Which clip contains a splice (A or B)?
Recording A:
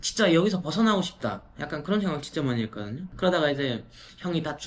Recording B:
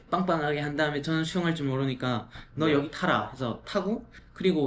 A